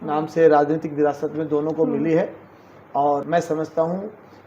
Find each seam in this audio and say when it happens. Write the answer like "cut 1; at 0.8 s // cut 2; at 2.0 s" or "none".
cut 1; at 3.2 s